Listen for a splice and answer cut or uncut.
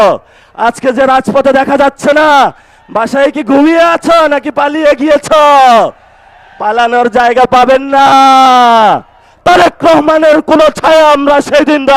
cut